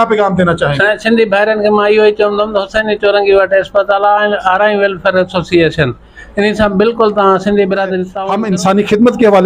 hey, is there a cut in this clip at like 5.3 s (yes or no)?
no